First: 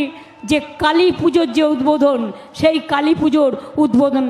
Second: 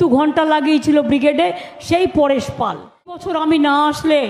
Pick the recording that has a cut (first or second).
second